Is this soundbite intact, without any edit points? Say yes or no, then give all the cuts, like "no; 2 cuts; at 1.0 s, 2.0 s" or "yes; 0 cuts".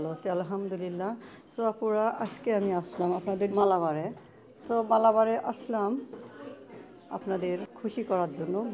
no; 2 cuts; at 3.5 s, 7.7 s